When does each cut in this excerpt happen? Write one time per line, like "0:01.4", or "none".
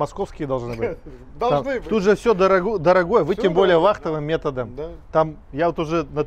none

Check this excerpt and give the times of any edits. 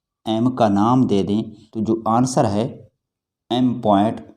0:01.6

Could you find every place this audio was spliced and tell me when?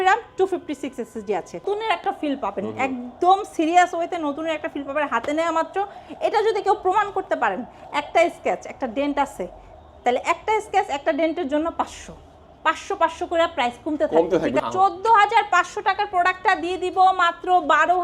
0:01.6
0:14.6

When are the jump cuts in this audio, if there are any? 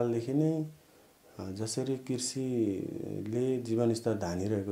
none

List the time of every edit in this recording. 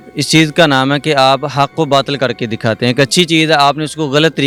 none

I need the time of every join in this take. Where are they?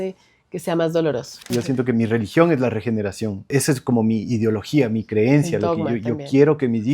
0:01.4
0:03.5

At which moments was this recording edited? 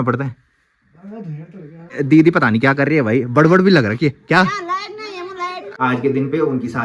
0:02.0
0:05.6

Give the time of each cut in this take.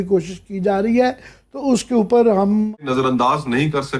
0:02.8

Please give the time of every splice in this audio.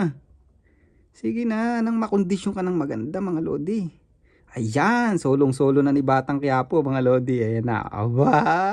none

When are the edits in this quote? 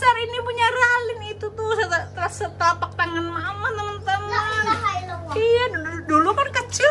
none

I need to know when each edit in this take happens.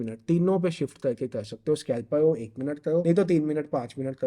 0:03.0

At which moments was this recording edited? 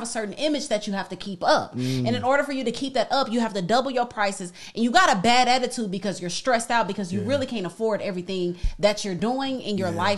0:09.2

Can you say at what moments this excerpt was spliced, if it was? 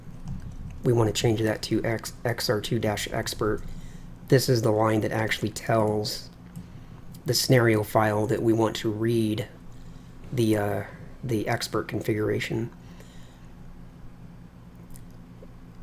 0:09.1

